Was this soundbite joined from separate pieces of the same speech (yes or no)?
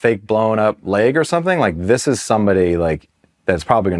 no